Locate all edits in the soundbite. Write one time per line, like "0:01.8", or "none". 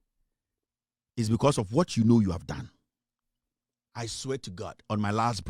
none